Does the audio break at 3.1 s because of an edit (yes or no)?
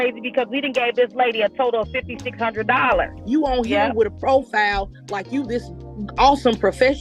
yes